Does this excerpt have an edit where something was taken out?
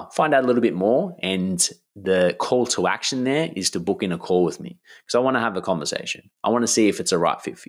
no; 0 cuts

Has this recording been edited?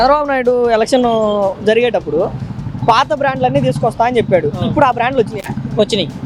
no; 0 cuts

